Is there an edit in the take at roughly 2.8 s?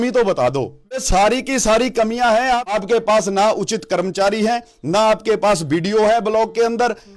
yes; 2 cuts; at 1.0 s, 2.8 s

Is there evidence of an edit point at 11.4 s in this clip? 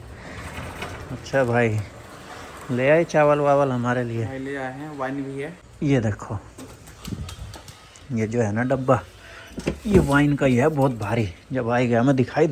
no; 1 cut; at 5.6 s

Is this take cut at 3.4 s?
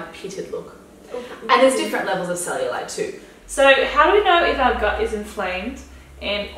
yes; 1 cut; at 3.4 s

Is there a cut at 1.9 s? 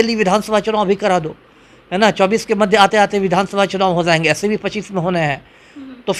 no; 0 cuts

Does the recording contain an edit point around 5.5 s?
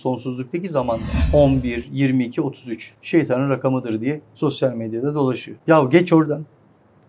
yes; 2 cuts; at 1.1 s, 5.5 s

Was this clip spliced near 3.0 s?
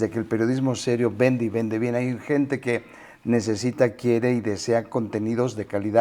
no; 0 cuts

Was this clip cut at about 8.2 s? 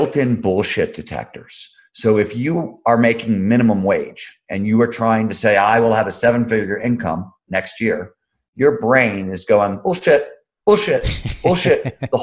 no; 0 cuts

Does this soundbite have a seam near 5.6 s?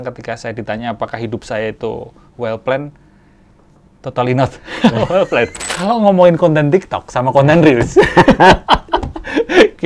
yes; 1 cut; at 5.6 s

